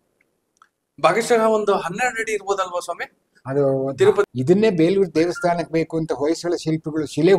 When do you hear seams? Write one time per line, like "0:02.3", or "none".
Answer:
0:04.3